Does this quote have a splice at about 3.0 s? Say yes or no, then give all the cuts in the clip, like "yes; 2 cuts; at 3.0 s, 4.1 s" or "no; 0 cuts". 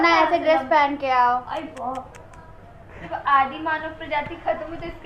yes; 1 cut; at 3.0 s